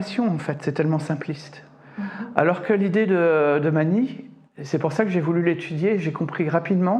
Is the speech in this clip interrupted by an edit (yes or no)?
no